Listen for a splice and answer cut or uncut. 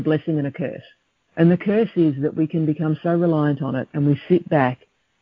uncut